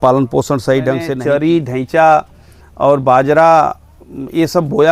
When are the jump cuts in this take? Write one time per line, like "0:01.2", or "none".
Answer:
0:01.1

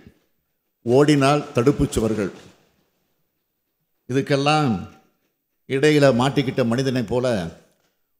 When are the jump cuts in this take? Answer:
none

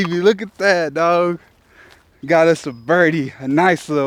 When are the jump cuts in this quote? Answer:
none

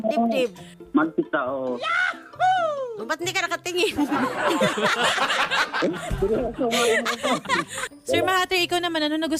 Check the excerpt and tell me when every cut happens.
0:07.9

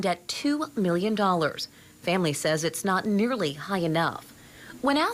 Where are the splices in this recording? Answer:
none

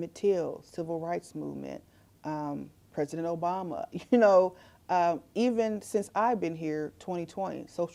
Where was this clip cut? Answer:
none

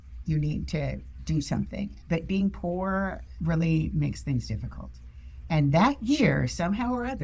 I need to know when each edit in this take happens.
0:02.0
0:03.3

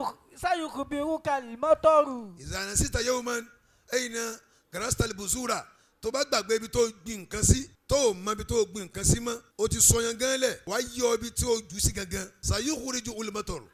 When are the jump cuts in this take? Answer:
0:07.7
0:09.5
0:10.6
0:12.4

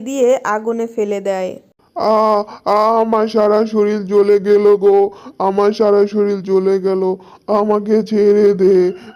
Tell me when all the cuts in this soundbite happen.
none

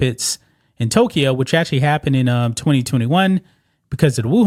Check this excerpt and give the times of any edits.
none

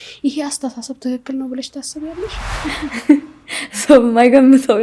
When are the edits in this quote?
0:02.5

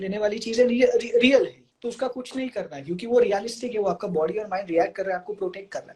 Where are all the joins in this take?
0:01.7

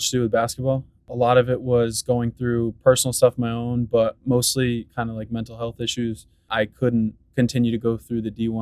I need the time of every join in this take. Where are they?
0:01.0
0:06.5

